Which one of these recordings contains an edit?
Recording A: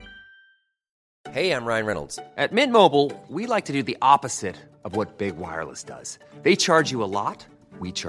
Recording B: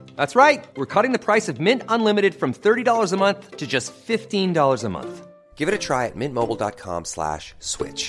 A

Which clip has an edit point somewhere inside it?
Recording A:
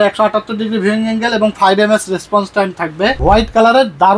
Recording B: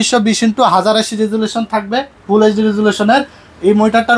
A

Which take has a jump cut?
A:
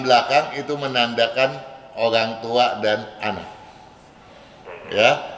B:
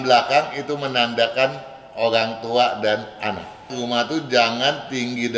B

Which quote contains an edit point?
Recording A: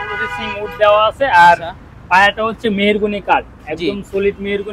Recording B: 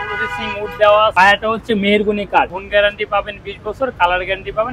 B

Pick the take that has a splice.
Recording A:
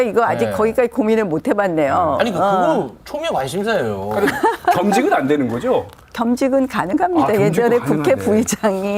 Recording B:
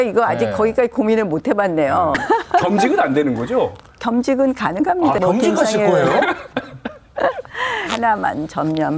B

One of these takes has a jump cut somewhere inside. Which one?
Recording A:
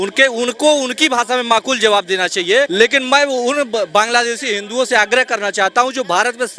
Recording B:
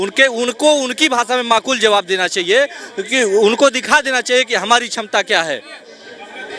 A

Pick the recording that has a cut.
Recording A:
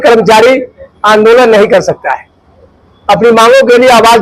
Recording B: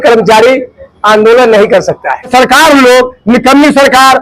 B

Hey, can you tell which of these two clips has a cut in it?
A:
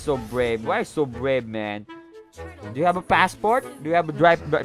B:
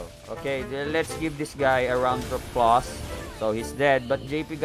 B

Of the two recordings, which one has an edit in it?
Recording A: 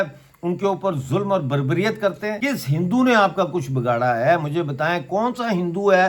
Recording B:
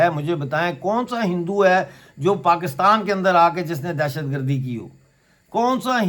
A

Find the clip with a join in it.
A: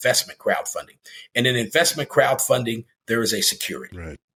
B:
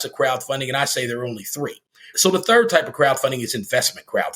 B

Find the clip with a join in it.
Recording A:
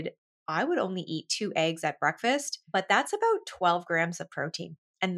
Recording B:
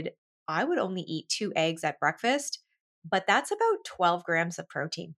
A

